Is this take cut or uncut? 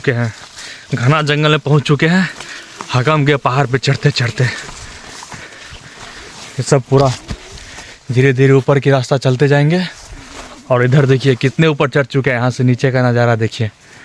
uncut